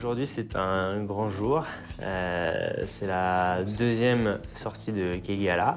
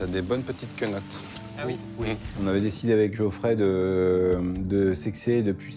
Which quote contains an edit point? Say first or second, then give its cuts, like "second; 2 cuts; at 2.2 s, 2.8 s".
second; 1 cut; at 2.3 s